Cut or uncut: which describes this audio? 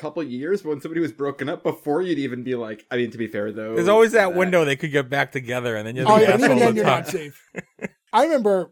cut